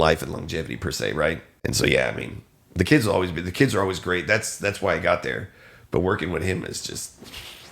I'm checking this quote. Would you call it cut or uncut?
cut